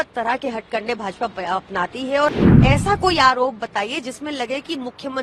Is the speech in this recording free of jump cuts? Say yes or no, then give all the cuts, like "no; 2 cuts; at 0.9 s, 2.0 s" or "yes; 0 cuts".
no; 1 cut; at 2.4 s